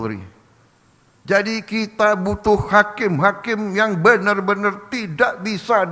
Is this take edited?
no; 0 cuts

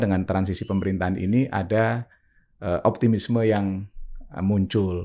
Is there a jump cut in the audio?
no; 0 cuts

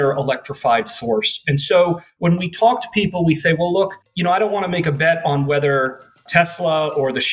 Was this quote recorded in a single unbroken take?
no; 1 cut; at 2.1 s

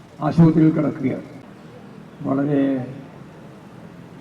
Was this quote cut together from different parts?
yes; 1 cut; at 2.1 s

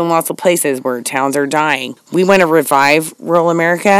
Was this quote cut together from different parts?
yes; 1 cut; at 1.9 s

